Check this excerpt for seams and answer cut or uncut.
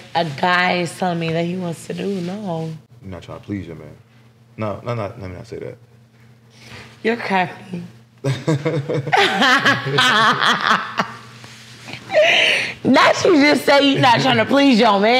cut